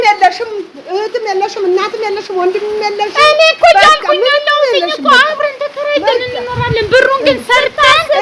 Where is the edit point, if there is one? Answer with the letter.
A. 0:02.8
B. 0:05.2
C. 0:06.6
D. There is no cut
D